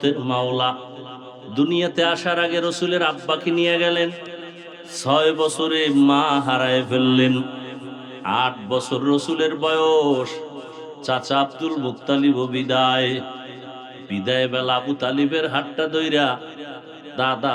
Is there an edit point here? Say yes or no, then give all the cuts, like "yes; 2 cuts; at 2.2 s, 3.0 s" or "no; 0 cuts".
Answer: no; 0 cuts